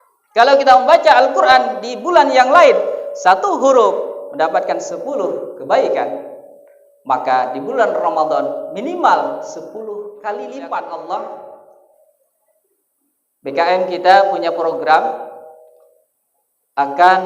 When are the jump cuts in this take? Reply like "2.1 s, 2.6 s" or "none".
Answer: 10.8 s